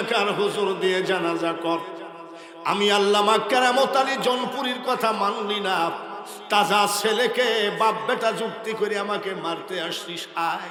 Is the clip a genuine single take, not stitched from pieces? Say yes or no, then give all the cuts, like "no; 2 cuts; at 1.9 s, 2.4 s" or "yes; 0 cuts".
yes; 0 cuts